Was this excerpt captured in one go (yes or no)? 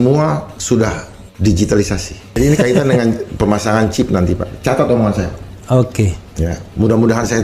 no